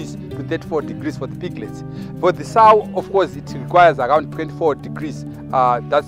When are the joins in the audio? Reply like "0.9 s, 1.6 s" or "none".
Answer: none